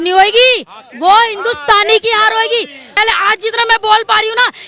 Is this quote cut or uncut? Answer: cut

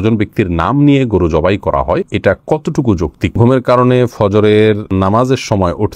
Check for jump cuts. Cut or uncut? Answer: cut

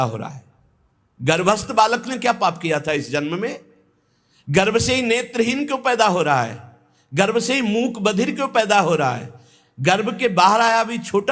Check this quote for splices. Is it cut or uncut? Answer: uncut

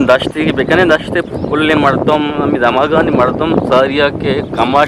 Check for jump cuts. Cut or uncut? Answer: uncut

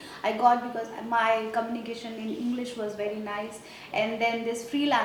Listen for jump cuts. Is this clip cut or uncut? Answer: uncut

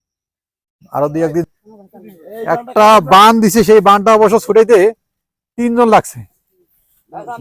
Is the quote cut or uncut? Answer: cut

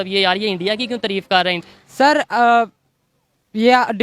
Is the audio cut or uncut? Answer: cut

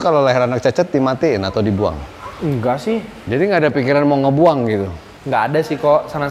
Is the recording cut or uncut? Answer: cut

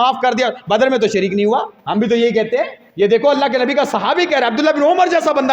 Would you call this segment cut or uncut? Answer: cut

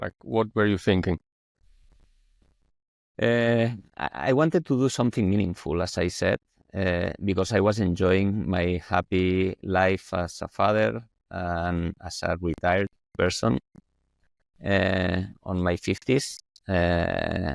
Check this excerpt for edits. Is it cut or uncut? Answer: uncut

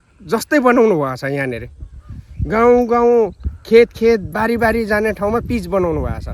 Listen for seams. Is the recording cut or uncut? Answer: uncut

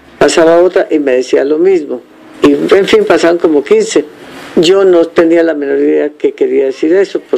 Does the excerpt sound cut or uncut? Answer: uncut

